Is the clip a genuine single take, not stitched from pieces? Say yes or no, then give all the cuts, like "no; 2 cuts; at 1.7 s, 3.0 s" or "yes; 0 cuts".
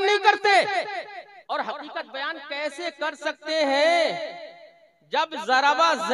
no; 1 cut; at 1.3 s